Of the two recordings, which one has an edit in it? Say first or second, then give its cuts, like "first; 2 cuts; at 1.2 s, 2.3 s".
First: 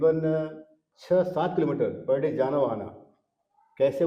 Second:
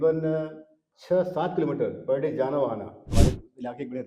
second; 1 cut; at 3.0 s